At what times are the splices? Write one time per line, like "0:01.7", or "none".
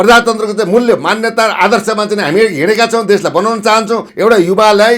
0:04.1